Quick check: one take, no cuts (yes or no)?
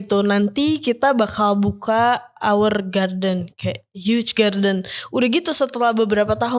yes